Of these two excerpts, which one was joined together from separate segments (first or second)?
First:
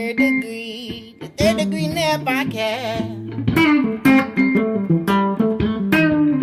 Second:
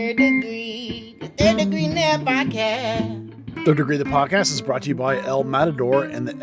second